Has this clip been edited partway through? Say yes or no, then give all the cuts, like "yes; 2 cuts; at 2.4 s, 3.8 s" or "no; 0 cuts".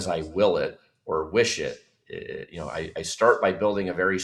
no; 0 cuts